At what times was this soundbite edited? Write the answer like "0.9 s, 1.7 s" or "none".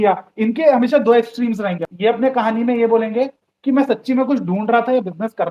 1.8 s